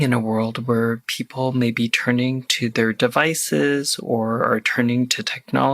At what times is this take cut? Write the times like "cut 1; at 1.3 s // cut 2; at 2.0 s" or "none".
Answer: none